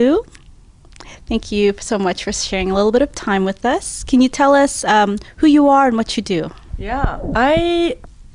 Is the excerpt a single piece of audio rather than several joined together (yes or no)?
yes